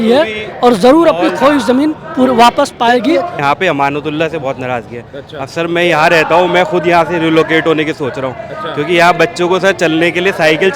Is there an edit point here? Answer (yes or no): yes